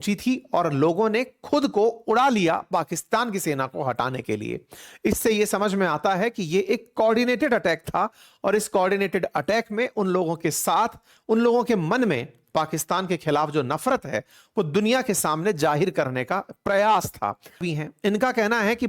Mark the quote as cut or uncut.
cut